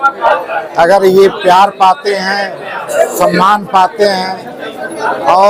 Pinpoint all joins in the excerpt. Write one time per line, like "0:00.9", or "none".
none